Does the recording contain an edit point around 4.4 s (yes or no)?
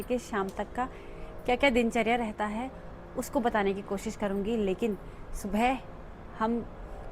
no